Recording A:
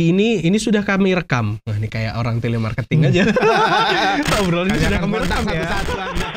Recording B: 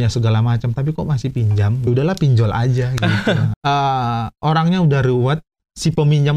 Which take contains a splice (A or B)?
B